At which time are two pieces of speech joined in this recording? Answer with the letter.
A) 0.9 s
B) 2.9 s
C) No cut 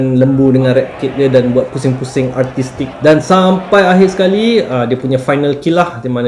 B